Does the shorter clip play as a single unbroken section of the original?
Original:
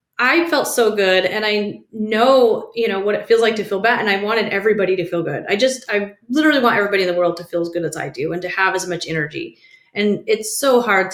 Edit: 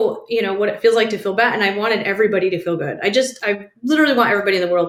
yes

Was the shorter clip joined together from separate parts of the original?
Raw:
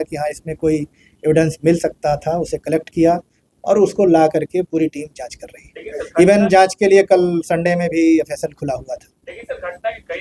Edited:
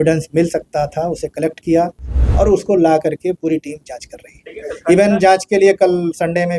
no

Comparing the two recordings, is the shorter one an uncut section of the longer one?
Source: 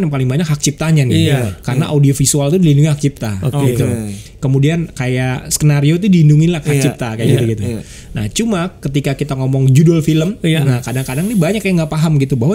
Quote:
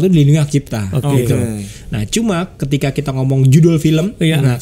no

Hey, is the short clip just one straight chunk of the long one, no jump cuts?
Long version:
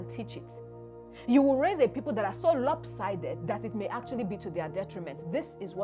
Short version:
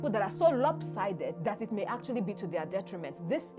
yes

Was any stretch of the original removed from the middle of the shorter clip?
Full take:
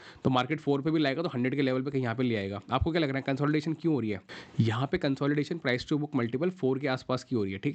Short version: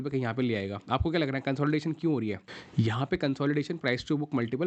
no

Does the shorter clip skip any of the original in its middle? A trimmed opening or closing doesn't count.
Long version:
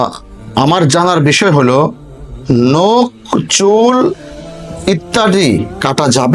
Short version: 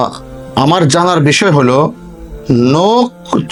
no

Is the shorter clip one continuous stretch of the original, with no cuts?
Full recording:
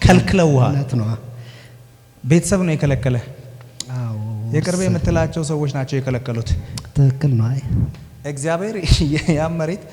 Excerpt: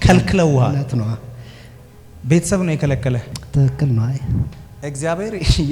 no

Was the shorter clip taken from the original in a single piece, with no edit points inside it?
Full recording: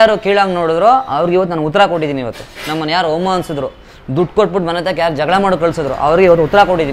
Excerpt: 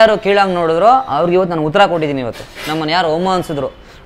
yes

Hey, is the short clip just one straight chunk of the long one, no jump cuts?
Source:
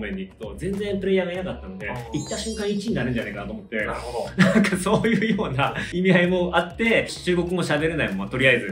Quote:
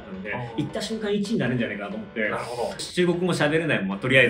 no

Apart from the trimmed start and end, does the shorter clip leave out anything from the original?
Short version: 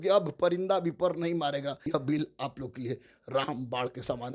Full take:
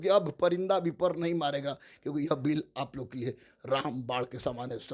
yes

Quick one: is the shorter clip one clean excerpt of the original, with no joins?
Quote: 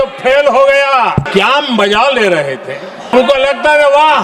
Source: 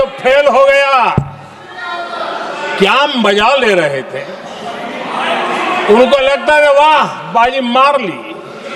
no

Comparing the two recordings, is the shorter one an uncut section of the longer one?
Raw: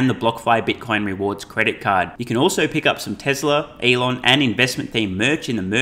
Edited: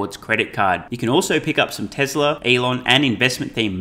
no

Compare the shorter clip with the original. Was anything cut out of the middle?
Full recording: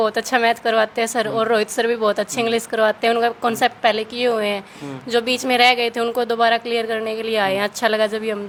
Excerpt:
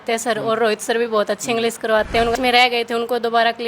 yes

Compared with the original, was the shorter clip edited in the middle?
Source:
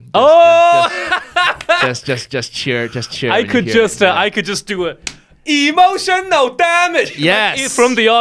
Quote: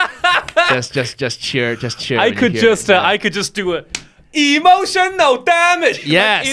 no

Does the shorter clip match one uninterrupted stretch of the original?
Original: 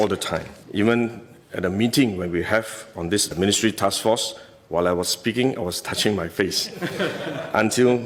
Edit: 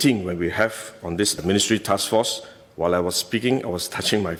yes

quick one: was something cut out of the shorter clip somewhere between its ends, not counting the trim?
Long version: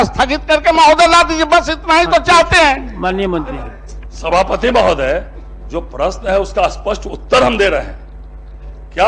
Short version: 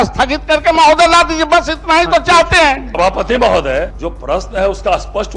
yes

